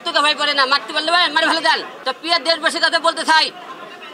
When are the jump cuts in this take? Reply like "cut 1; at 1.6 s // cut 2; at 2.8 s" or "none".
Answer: cut 1; at 1.9 s